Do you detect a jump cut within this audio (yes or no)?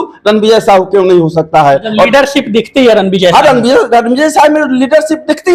no